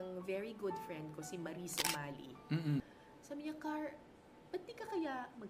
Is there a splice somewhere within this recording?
yes; 1 cut; at 2.8 s

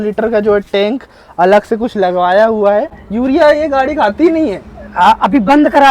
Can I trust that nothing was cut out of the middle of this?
no; 1 cut; at 3.0 s

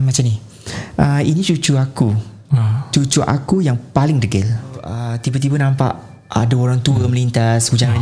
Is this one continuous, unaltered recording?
no; 1 cut; at 5.0 s

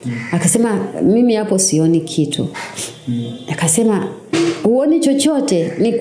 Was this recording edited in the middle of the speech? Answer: no; 0 cuts

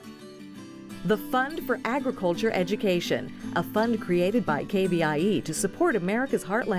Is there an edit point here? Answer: yes; 1 cut; at 1.0 s

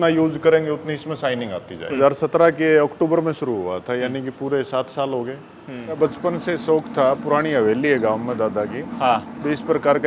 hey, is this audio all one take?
no; 2 cuts; at 2.0 s, 6.0 s

